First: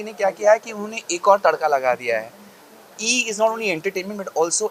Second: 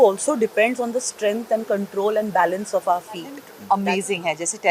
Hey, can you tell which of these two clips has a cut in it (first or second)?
second